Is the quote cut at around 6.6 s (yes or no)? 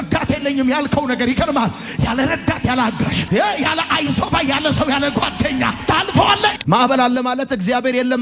yes